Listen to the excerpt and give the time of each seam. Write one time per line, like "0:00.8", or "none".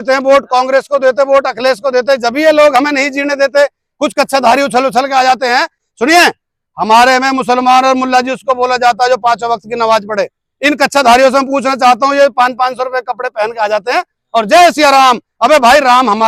none